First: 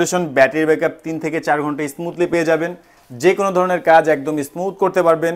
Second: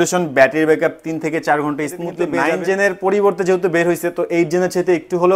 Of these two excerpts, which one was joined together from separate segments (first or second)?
second